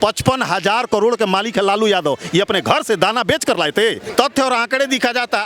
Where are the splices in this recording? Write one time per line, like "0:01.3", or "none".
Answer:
0:04.0